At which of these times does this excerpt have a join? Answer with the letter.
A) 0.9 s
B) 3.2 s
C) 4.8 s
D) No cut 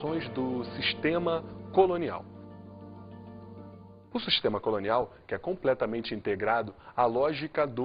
A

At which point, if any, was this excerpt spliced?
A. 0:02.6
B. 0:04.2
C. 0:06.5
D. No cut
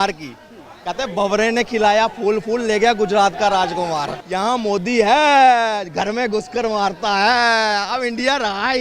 B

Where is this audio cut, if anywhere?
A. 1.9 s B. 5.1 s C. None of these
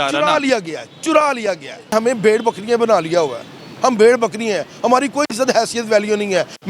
A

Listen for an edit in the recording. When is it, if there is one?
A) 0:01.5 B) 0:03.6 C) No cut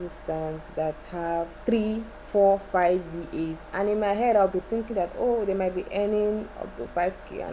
A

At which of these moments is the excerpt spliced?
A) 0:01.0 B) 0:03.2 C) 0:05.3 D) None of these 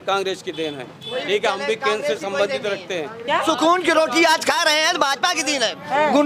B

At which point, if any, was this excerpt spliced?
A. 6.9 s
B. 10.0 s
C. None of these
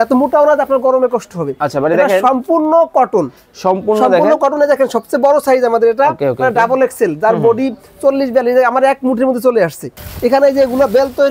B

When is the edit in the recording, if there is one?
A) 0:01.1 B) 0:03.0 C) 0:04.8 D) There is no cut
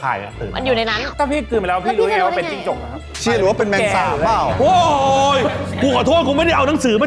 A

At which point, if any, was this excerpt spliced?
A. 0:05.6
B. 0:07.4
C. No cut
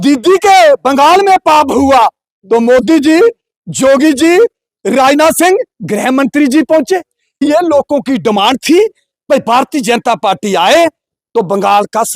B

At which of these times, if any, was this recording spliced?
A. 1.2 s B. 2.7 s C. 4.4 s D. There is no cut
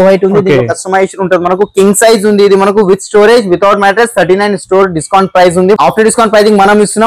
D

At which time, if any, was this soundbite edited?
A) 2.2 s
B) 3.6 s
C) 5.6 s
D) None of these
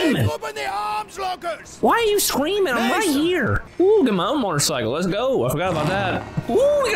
B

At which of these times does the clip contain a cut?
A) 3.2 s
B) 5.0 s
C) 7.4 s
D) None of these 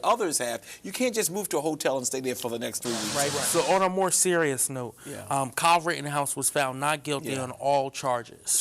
A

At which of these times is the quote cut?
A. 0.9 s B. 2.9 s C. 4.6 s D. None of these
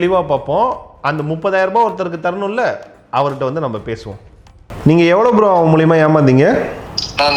C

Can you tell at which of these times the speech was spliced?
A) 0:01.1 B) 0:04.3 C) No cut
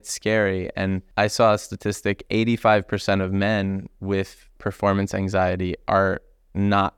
A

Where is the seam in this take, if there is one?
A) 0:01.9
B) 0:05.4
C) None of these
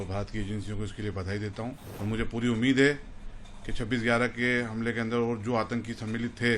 A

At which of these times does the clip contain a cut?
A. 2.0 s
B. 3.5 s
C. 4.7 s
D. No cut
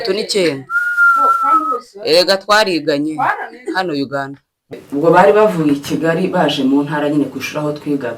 C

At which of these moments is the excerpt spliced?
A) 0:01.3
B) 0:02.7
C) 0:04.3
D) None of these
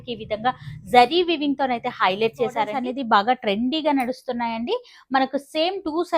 B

